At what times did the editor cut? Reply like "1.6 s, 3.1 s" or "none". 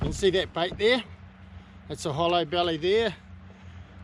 none